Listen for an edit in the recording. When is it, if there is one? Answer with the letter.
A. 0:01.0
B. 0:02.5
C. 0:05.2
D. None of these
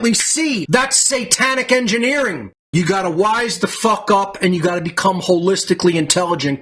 B